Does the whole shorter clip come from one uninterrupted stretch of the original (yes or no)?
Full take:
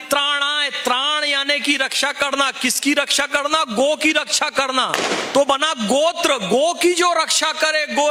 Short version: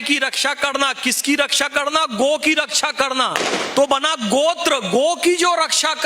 yes